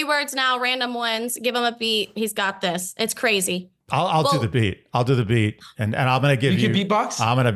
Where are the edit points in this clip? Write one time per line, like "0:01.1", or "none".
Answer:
0:03.8